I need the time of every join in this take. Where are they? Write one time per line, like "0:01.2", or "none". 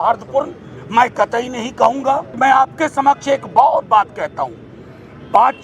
0:02.4